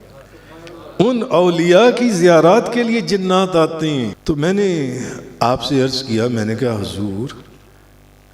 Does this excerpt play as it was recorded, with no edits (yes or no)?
no